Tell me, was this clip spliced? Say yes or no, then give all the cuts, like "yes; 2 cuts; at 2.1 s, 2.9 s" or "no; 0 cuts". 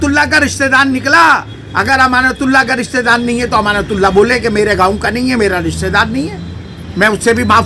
no; 0 cuts